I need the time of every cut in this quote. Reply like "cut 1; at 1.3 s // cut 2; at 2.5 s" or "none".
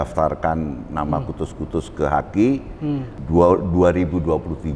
cut 1; at 3.2 s